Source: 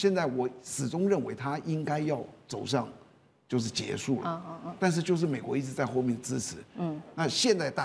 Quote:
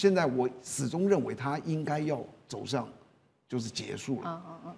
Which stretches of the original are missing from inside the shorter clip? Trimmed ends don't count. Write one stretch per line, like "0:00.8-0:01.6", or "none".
none